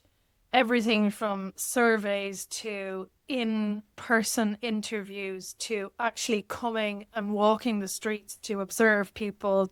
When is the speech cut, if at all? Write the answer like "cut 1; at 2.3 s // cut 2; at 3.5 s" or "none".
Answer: none